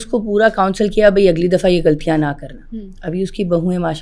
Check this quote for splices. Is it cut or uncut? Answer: uncut